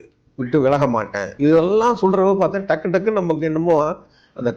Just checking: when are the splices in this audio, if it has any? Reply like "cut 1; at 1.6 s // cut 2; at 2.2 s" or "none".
cut 1; at 1.3 s